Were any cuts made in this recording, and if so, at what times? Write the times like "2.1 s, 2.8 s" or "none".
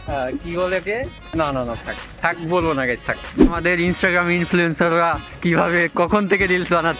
1.2 s, 3.4 s